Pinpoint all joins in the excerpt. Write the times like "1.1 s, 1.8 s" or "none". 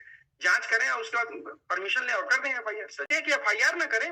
3.1 s